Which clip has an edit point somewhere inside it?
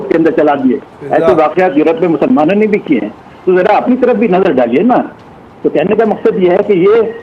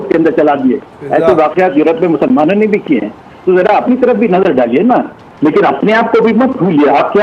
second; 1 cut; at 5.2 s

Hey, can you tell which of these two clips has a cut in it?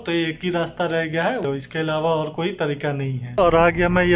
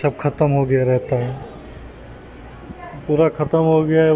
first; 2 cuts; at 1.4 s, 3.4 s

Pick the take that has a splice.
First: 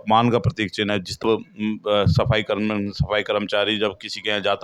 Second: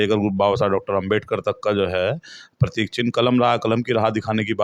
first; 1 cut; at 1.2 s

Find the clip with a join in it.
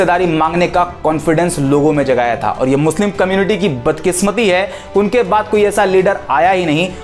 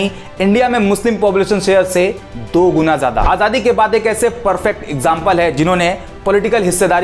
second; 1 cut; at 3.2 s

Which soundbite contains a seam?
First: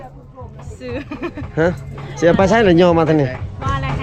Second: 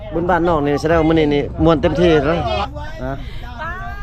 second; 1 cut; at 2.7 s

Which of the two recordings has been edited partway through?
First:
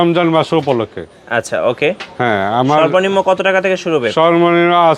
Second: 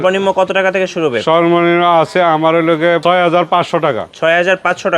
second; 2 cuts; at 3.0 s, 4.1 s

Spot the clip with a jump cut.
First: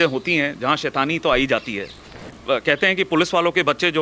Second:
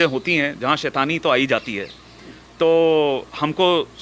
first; 1 cut; at 2.4 s

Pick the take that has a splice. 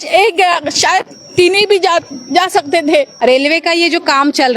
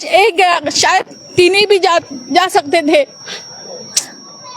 first; 1 cut; at 3.1 s

